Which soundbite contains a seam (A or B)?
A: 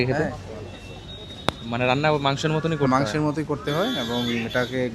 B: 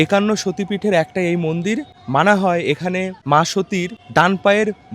B